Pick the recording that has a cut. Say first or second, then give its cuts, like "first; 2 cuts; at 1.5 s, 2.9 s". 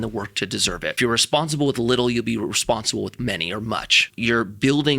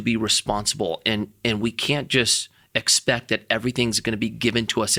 first; 2 cuts; at 1.0 s, 4.1 s